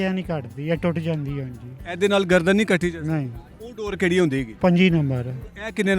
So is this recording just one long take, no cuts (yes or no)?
no